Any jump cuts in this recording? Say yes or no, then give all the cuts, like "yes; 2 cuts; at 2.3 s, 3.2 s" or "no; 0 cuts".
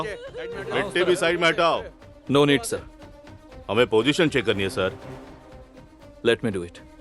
no; 0 cuts